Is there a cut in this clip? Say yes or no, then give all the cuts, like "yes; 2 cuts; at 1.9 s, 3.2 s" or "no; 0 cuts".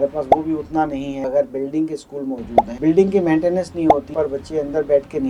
yes; 3 cuts; at 1.2 s, 2.7 s, 4.1 s